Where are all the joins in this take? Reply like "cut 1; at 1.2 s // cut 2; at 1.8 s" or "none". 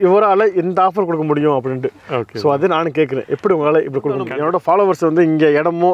cut 1; at 4.3 s